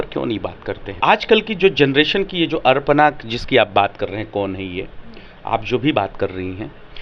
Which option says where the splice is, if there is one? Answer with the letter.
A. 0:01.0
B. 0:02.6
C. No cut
A